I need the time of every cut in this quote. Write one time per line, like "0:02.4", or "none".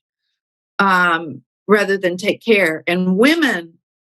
none

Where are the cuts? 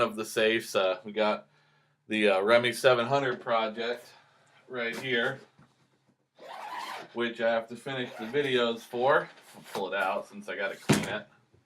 0:06.7

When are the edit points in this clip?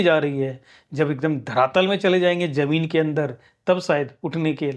none

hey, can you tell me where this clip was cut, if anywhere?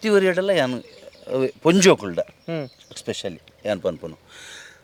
none

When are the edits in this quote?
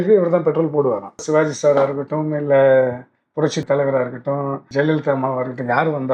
0:01.2
0:03.6
0:04.6

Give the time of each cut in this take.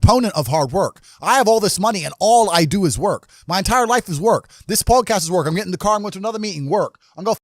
none

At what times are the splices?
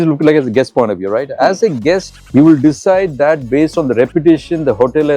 0:02.1

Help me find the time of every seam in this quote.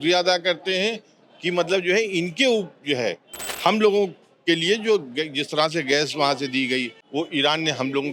0:07.0

